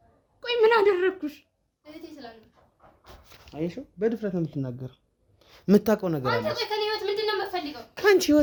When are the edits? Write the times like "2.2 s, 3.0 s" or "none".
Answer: none